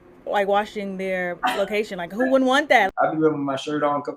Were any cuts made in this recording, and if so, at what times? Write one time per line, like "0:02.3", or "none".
0:02.9

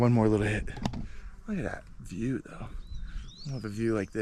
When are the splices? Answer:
none

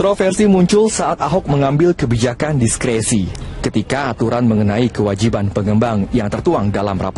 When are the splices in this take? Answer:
none

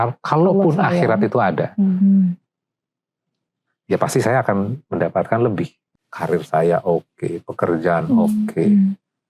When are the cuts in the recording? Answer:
0:05.8

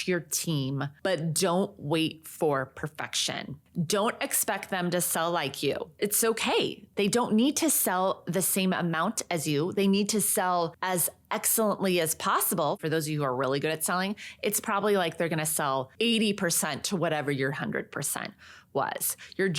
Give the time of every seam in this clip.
0:00.9
0:03.6
0:10.8
0:12.8
0:15.9

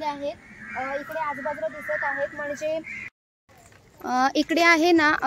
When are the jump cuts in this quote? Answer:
0:03.1

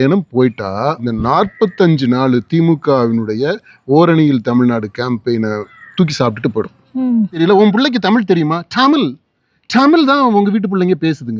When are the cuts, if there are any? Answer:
0:01.0
0:07.4

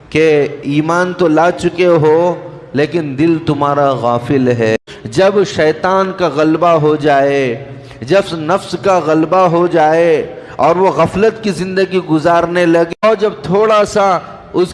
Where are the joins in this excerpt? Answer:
0:04.8
0:13.0

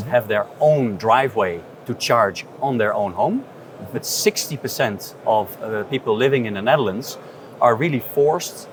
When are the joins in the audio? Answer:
none

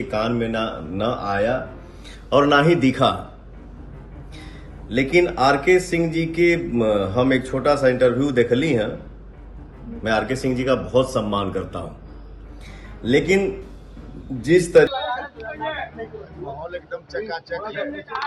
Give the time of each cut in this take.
0:14.9

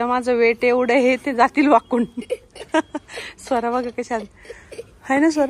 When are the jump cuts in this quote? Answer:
none

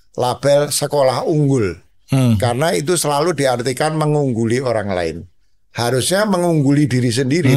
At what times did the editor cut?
none

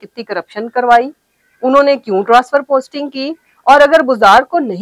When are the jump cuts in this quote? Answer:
none

